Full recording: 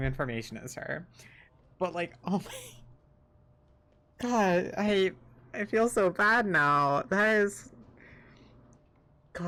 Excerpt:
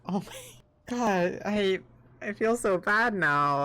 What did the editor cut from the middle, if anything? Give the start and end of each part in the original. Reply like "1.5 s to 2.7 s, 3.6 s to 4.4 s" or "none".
3.3 s to 4.4 s

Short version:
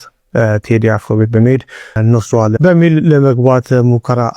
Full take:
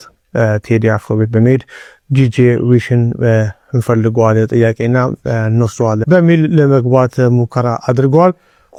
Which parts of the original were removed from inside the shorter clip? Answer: 2.0 s to 5.4 s

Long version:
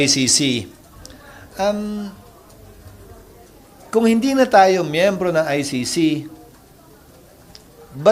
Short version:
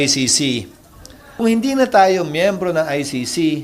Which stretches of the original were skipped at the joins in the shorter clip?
1.4 s to 4.0 s

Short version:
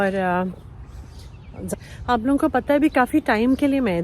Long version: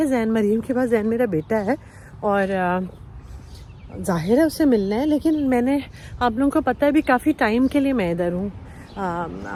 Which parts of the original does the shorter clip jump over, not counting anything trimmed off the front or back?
4.1 s to 5.8 s

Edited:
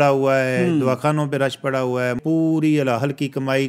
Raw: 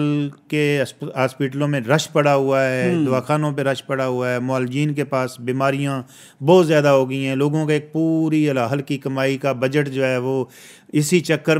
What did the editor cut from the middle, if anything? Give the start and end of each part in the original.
4.4 s to 7.9 s

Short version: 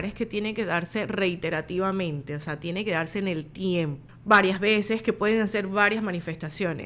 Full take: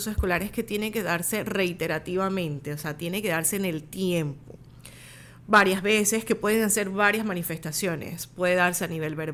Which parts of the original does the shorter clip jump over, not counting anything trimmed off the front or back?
4.4 s to 5.3 s

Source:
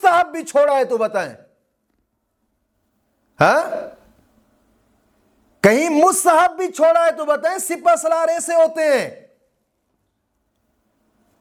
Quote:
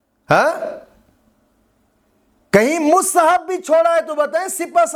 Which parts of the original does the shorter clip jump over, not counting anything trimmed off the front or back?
none

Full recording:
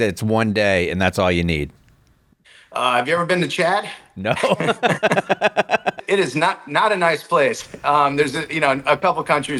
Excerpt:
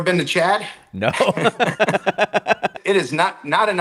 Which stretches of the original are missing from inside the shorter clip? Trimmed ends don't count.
none

